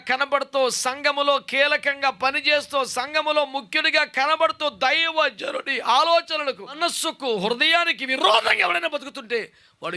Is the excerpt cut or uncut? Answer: cut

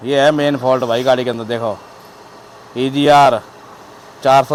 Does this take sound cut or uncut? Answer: uncut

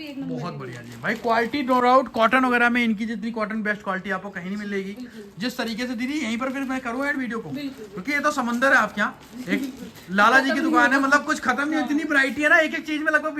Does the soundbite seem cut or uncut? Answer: uncut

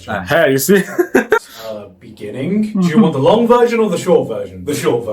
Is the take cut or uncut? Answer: cut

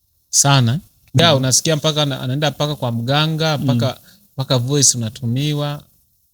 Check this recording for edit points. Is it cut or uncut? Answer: cut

